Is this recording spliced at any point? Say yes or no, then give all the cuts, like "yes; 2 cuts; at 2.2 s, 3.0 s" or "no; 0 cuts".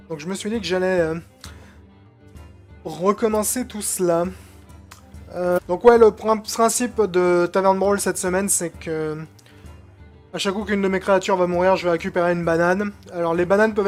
no; 0 cuts